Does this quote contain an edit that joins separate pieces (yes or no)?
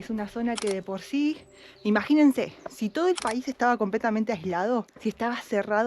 yes